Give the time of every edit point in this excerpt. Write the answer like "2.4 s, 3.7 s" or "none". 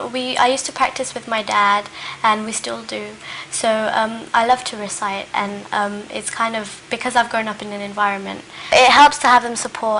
none

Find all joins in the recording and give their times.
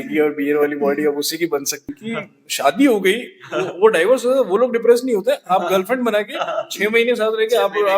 1.8 s

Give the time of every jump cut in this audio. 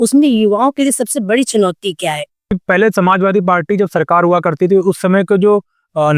2.5 s

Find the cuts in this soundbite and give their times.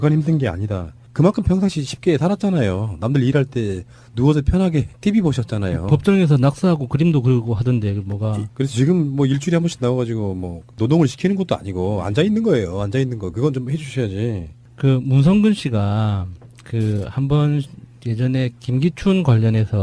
none

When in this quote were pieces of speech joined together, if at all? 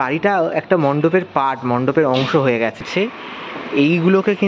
2.8 s

